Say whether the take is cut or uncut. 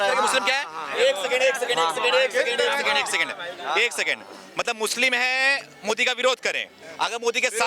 uncut